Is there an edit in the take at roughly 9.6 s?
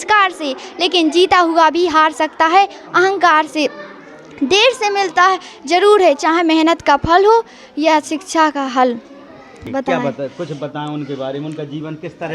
yes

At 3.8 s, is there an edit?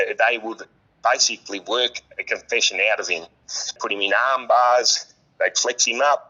yes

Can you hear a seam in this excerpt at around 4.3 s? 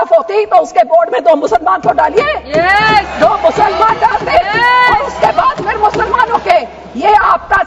no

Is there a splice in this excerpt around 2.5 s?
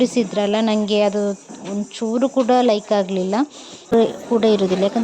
no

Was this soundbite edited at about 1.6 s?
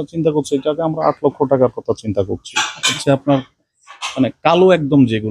no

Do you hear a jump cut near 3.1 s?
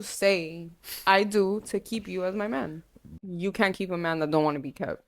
yes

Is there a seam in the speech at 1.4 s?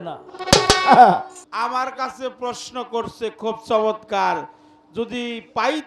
yes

